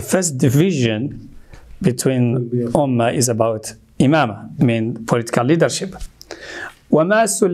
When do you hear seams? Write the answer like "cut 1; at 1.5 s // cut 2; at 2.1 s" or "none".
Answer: none